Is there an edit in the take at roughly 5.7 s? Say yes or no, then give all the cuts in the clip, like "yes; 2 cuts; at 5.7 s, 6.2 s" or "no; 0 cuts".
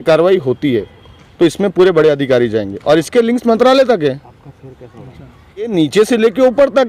yes; 1 cut; at 5.7 s